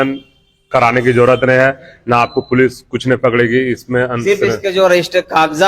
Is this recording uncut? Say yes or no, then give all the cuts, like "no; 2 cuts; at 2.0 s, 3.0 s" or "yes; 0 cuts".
yes; 0 cuts